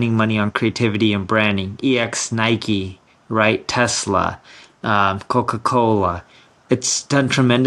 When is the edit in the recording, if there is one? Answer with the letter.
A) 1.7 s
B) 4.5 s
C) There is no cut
C